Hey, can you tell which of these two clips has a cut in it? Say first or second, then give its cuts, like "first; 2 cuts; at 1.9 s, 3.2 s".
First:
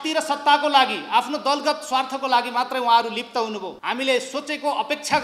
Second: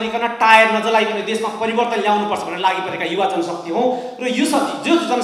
first; 1 cut; at 3.7 s